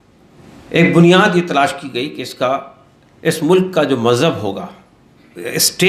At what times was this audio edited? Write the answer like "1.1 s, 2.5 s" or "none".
none